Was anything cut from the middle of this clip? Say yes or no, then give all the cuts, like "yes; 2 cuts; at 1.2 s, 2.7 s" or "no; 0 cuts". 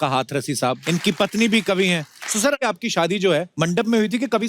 yes; 3 cuts; at 0.8 s, 2.6 s, 3.5 s